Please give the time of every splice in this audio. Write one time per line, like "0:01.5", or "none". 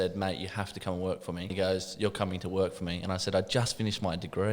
0:01.5